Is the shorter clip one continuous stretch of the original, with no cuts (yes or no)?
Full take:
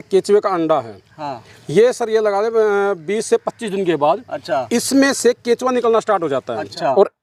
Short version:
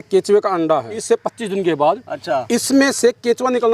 no